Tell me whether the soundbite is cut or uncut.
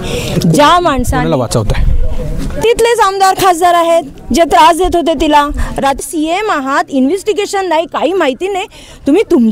cut